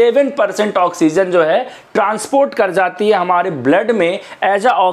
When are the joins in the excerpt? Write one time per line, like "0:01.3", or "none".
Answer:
none